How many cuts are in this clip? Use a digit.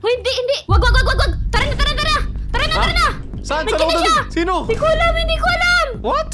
0